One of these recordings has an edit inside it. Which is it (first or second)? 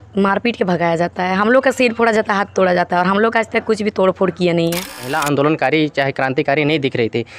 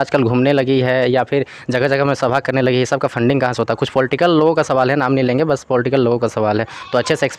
first